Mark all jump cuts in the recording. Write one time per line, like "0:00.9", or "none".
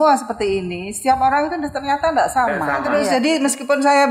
0:03.0